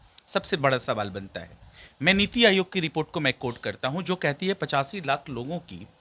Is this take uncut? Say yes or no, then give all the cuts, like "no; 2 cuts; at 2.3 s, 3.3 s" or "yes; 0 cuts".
yes; 0 cuts